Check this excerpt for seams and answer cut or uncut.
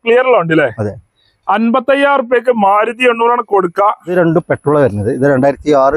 cut